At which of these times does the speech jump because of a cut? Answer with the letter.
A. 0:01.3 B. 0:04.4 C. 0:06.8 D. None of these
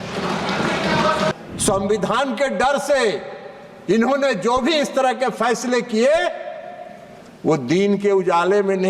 A